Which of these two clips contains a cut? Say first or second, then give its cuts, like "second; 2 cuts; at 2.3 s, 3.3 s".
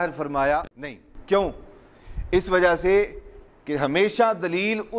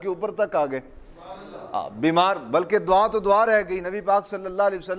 first; 1 cut; at 1.1 s